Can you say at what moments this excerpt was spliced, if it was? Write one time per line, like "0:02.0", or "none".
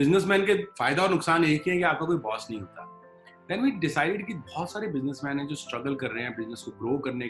none

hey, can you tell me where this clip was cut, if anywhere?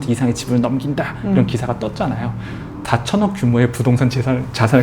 0:02.8

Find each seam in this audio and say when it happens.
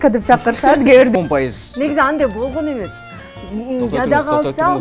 0:01.1

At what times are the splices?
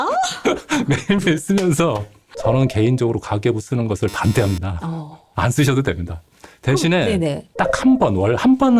0:02.3

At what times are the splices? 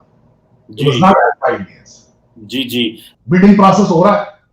0:03.1

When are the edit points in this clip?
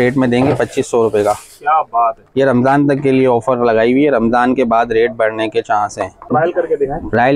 0:06.3

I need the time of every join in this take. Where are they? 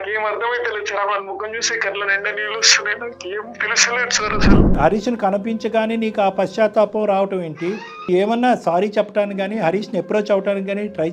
0:04.8
0:08.1

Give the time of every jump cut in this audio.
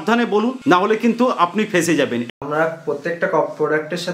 0:02.3

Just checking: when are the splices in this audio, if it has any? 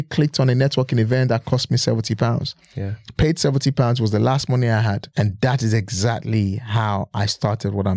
none

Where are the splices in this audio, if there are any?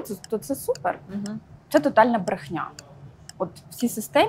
0:01.5

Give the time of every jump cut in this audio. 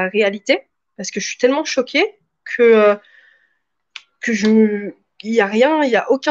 none

